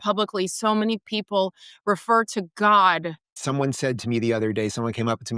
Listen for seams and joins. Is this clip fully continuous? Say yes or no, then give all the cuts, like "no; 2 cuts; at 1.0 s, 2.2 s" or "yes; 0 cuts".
no; 1 cut; at 3.4 s